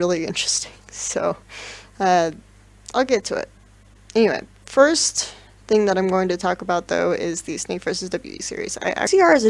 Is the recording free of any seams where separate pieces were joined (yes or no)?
no